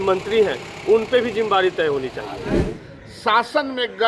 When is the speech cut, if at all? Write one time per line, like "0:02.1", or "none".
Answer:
0:02.8